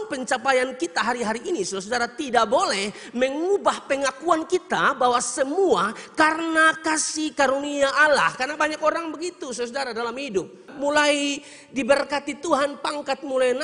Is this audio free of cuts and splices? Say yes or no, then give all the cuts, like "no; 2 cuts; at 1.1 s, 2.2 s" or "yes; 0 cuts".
no; 1 cut; at 10.7 s